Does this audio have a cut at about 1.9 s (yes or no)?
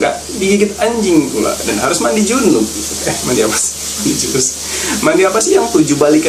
no